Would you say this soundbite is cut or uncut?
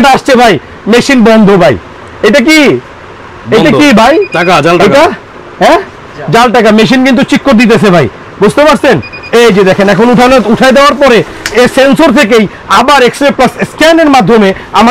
uncut